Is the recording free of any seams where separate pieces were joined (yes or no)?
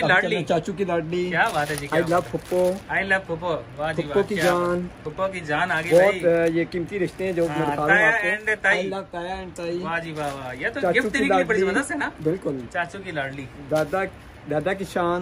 yes